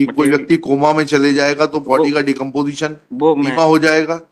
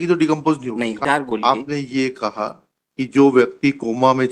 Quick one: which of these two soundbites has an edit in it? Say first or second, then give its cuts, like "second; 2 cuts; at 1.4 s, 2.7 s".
second; 1 cut; at 1.0 s